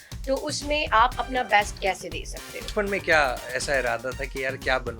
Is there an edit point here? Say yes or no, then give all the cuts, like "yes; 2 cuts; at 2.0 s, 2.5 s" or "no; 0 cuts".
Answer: yes; 1 cut; at 2.7 s